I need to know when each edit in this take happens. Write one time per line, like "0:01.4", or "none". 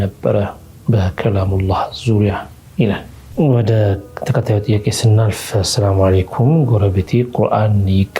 0:03.1

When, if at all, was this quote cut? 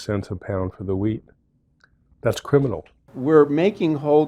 0:03.1

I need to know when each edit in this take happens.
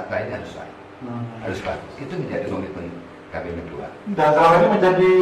none

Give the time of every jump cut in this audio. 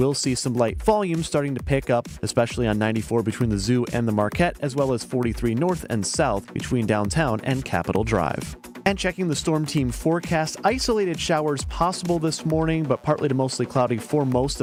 none

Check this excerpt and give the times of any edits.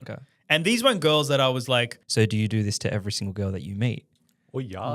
0:02.0

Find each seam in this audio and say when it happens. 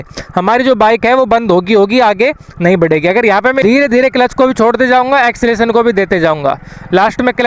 0:03.6

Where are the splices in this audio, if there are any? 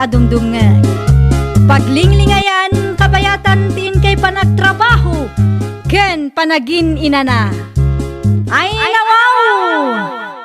0:08.5

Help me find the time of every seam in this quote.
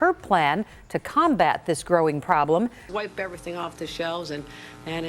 0:02.9

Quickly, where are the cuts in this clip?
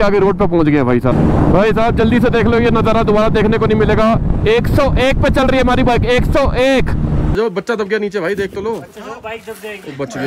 0:01.1
0:07.3

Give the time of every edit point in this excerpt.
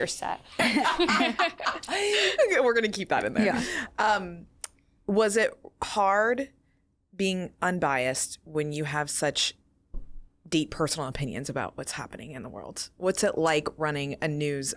none

